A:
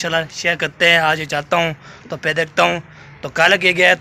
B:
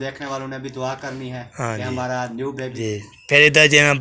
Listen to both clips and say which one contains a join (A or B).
B